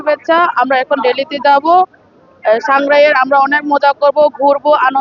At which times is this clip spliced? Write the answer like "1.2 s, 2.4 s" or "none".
none